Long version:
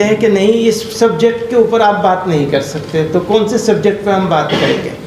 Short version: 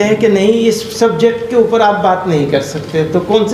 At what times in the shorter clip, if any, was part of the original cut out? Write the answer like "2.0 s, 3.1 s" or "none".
none